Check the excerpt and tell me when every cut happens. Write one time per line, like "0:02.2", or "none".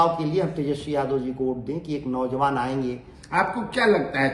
0:03.1